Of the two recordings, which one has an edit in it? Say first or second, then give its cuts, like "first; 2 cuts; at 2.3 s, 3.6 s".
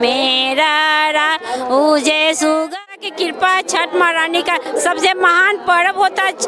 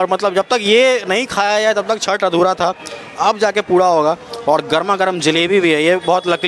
first; 1 cut; at 2.8 s